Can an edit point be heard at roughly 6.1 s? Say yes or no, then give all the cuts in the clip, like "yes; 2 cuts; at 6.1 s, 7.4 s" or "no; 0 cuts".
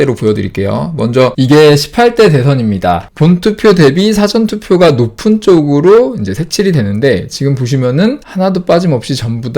no; 3 cuts; at 1.3 s, 3.1 s, 8.2 s